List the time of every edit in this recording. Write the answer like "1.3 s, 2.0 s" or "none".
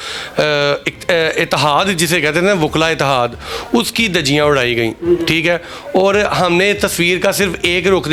none